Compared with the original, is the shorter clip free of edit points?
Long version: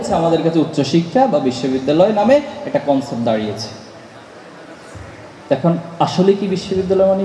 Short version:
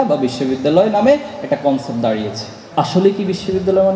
no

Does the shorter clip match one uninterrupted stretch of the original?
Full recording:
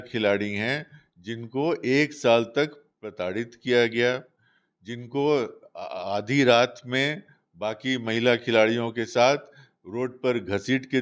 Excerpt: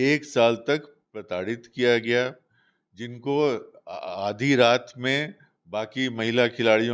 yes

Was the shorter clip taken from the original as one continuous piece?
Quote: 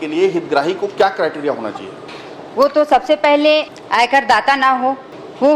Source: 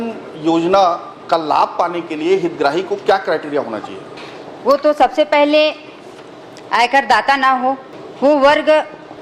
no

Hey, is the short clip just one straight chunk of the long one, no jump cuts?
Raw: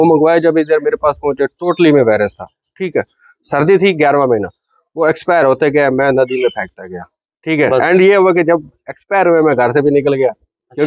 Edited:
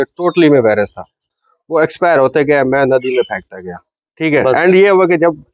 no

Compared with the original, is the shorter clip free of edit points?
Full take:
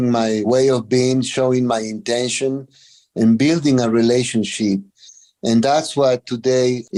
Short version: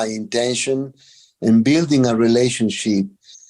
yes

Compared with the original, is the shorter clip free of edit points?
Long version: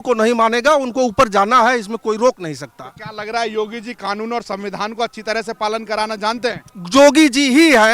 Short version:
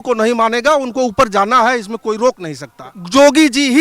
no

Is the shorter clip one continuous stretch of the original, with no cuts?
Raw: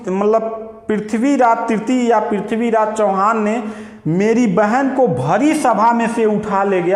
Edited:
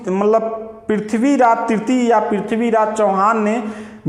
yes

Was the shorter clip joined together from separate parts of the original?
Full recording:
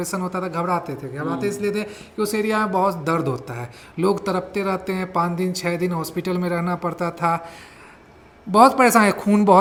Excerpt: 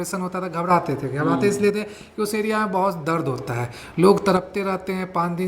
no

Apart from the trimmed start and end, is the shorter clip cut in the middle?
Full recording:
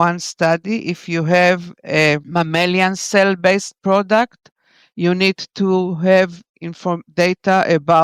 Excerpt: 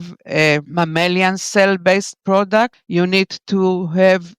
yes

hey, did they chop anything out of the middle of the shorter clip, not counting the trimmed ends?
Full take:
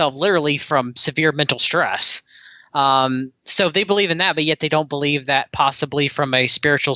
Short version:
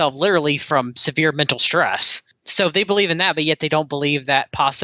yes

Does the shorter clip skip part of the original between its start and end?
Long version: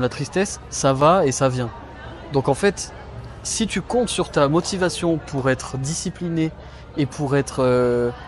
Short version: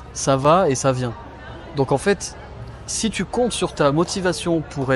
no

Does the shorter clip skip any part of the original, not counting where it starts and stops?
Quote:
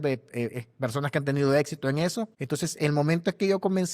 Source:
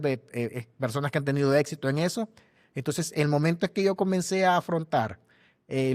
yes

